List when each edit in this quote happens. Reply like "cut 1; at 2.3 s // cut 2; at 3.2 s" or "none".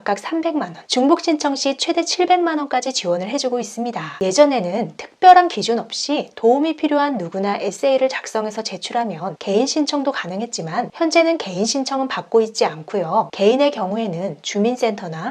none